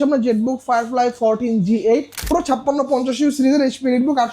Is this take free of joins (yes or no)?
no